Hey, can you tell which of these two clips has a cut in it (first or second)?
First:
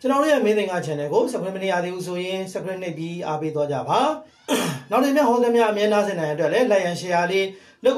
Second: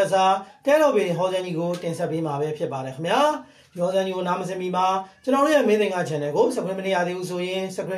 first